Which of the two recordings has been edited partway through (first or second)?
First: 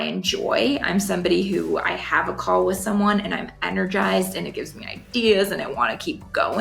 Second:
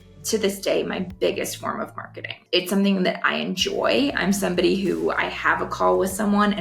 second